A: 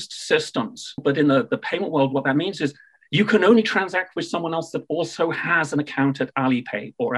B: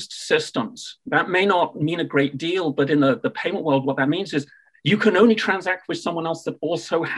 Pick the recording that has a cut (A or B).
A